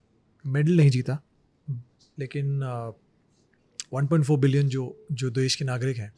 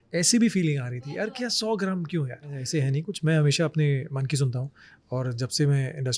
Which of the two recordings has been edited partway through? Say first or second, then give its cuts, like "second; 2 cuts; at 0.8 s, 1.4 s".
second; 1 cut; at 2.6 s